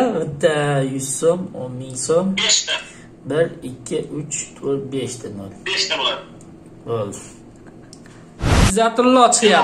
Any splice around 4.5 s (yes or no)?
no